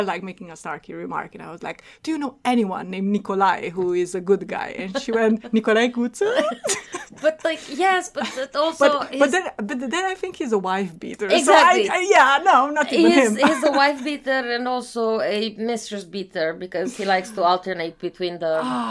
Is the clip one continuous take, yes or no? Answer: yes